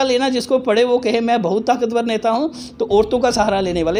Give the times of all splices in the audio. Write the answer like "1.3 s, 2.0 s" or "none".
none